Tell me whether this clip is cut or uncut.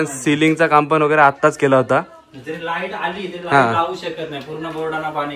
uncut